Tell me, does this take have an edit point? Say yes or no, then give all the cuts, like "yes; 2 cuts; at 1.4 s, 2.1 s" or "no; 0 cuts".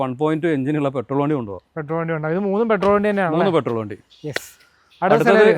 no; 0 cuts